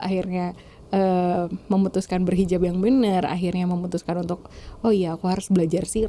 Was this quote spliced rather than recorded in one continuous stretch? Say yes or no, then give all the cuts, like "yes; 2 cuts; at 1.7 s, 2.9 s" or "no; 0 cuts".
no; 0 cuts